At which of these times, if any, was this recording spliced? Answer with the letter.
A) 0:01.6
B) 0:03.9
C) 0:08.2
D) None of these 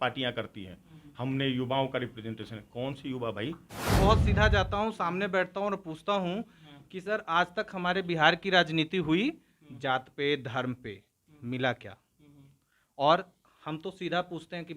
B